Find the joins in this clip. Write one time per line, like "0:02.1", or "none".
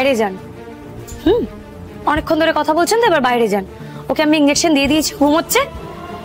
none